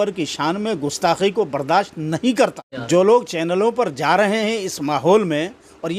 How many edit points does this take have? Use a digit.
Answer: 1